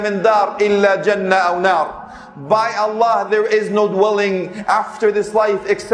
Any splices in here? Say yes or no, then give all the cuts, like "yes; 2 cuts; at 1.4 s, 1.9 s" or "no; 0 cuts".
no; 0 cuts